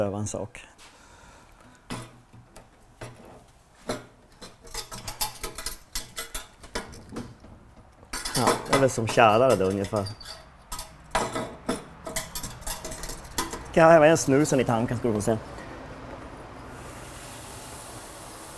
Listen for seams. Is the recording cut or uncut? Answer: uncut